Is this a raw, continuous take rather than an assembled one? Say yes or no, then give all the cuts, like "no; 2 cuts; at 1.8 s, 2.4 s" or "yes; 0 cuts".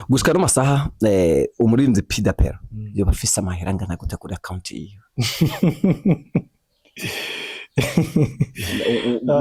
yes; 0 cuts